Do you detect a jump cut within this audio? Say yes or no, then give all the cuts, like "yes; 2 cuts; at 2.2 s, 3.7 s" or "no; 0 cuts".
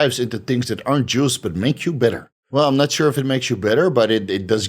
yes; 1 cut; at 2.3 s